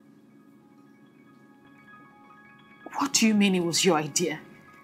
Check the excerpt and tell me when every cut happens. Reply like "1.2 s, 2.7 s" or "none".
1.6 s